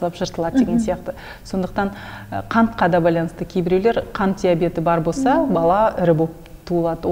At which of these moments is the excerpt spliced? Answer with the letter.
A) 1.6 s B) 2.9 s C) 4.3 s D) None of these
D